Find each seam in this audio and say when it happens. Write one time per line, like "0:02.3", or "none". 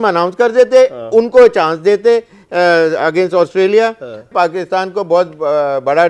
0:04.3